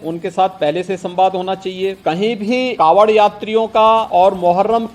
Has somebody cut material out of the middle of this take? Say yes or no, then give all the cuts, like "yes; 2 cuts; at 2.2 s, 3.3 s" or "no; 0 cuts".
yes; 3 cuts; at 2.0 s, 2.7 s, 4.1 s